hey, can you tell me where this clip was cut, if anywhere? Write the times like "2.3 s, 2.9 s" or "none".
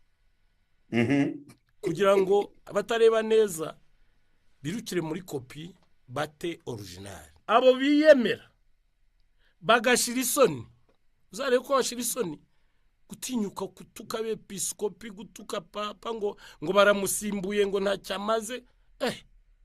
2.6 s, 7.3 s